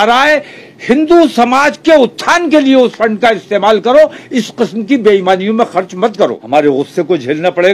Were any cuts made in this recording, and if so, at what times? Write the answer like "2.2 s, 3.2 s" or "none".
6.4 s